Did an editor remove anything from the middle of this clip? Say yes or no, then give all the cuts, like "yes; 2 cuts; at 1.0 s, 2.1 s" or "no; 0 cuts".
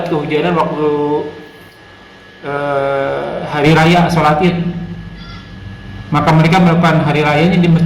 no; 0 cuts